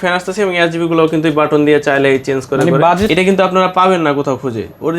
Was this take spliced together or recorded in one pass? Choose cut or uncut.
cut